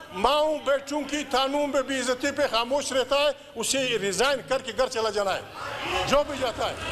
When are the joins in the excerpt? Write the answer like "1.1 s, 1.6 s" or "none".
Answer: none